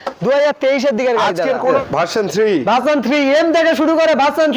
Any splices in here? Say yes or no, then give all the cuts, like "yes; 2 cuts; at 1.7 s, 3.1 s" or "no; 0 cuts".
yes; 1 cut; at 1.8 s